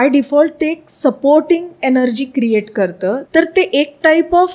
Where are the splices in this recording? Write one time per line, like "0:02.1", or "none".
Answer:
0:03.2